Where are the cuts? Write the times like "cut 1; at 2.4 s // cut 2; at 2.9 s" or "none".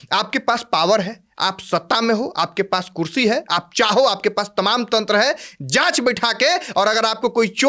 none